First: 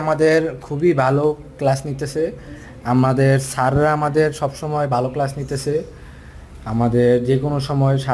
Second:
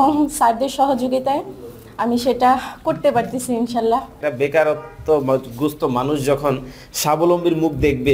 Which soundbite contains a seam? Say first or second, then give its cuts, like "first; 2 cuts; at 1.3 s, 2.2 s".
second; 1 cut; at 4.1 s